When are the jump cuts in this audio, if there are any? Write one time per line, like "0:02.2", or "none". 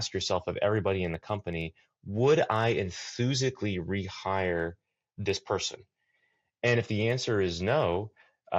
none